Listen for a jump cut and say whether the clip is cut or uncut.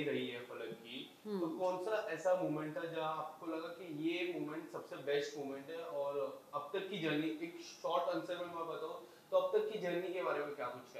uncut